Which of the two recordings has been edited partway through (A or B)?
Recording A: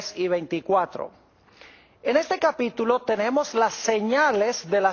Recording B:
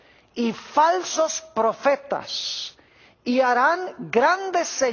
A